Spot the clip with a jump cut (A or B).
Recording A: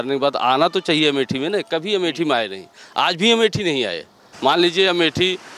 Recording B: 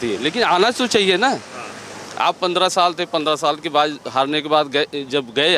A